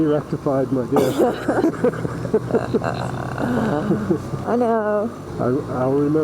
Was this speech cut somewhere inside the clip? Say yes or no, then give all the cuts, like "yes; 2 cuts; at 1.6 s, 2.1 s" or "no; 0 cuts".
no; 0 cuts